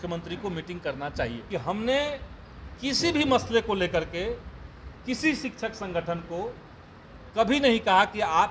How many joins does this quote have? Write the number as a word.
one